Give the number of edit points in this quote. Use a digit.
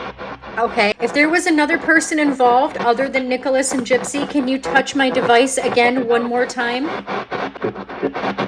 2